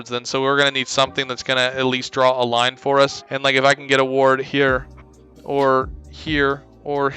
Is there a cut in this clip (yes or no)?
yes